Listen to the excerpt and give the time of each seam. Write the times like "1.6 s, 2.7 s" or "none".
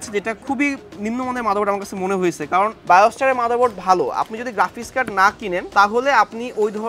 2.8 s, 5.7 s